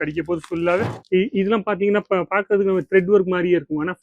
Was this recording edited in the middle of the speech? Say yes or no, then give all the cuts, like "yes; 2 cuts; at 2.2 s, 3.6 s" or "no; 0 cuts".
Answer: yes; 1 cut; at 0.9 s